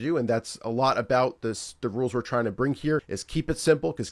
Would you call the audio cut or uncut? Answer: cut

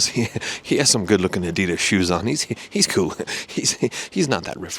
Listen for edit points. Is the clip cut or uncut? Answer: uncut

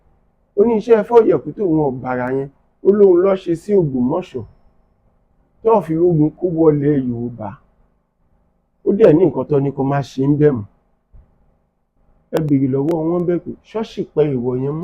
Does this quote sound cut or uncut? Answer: uncut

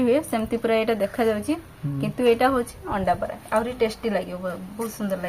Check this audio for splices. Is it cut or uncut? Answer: uncut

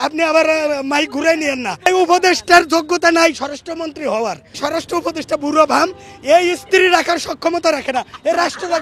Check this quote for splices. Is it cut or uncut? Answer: cut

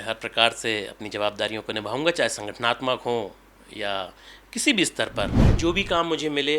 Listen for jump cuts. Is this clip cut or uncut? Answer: cut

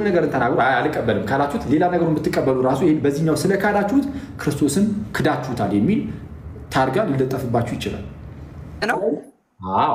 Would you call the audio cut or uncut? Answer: cut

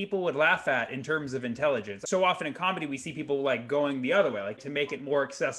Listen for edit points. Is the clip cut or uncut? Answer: cut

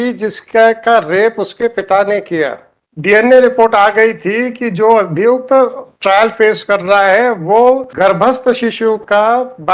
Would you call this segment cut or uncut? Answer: cut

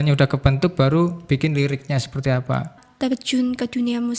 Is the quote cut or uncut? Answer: cut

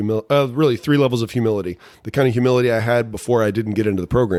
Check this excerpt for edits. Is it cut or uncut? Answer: uncut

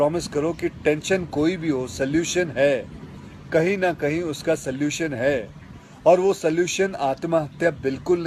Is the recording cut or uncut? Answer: uncut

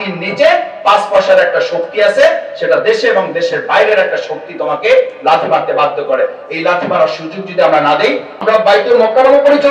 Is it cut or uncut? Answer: cut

